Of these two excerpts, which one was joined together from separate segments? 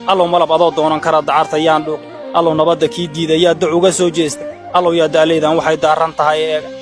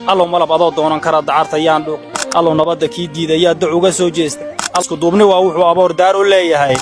second; 1 cut; at 4.7 s

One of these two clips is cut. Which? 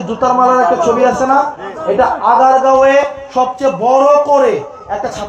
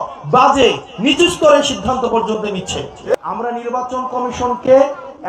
second; 1 cut; at 3.0 s

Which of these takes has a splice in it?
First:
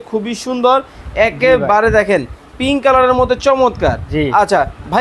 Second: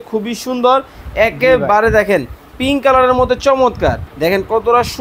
second; 1 cut; at 4.0 s

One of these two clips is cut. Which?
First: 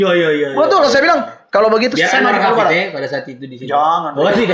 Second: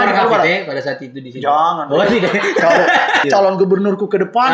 second; 1 cut; at 3.2 s

